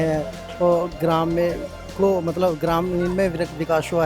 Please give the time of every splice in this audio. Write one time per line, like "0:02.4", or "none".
none